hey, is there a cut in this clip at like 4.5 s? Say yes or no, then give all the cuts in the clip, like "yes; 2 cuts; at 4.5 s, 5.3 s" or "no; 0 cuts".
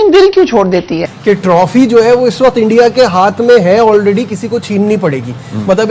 no; 1 cut; at 1.1 s